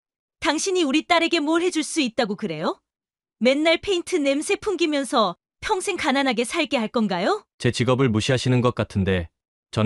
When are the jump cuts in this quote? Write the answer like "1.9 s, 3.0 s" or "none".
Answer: none